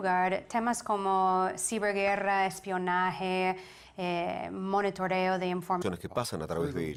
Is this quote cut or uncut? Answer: uncut